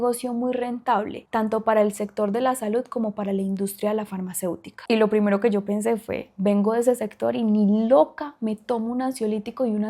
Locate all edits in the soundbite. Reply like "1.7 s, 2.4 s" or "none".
4.8 s